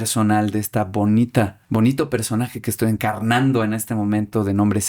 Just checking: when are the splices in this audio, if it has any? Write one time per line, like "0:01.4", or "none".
0:01.6
0:03.0

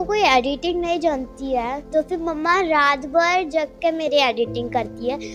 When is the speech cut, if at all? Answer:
none

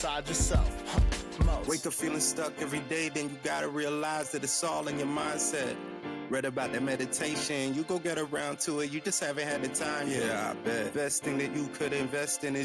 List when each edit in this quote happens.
none

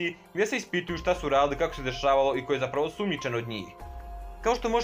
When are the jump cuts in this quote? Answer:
0:03.9

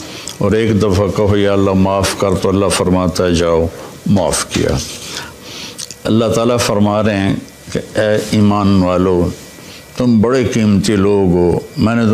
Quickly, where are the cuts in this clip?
0:05.3

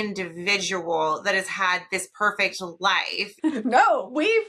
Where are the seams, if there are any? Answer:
0:03.6

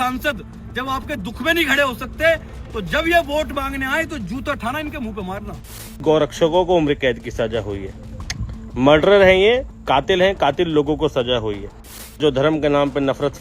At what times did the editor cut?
0:05.9
0:12.2

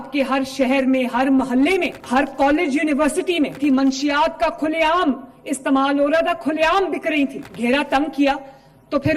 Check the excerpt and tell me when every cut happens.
0:02.0
0:03.6
0:07.4

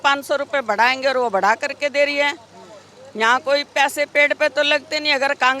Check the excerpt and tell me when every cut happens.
none

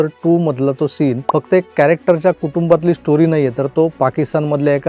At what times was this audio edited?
0:01.2

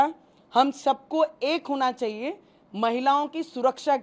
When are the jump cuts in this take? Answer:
none

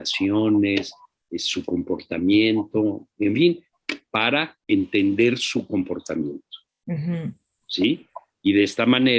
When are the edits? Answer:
0:04.5

